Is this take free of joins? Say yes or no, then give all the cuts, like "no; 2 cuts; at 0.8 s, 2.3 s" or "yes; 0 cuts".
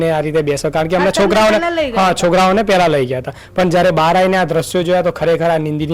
yes; 0 cuts